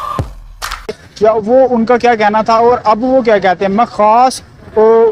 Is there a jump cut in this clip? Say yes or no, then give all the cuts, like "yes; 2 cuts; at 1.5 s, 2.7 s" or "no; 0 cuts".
no; 0 cuts